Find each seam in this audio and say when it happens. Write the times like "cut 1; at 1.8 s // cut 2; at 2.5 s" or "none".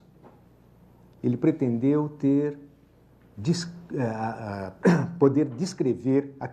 cut 1; at 4.2 s